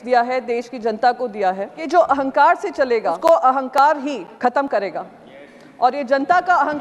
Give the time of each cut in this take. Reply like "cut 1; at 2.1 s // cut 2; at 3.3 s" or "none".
cut 1; at 1.7 s // cut 2; at 3.2 s // cut 3; at 4.3 s